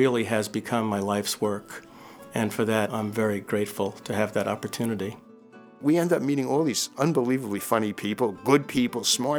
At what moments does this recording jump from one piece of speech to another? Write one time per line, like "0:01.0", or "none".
0:02.9
0:05.8